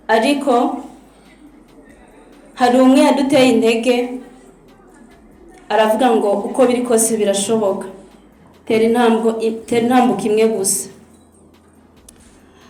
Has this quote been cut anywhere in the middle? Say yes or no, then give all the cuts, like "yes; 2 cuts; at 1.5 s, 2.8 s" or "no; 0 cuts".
no; 0 cuts